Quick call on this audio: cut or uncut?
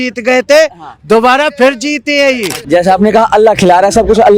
cut